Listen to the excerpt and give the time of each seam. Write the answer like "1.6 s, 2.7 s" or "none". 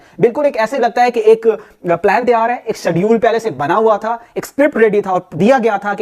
none